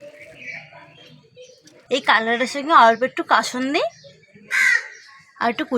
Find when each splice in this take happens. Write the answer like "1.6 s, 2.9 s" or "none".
1.7 s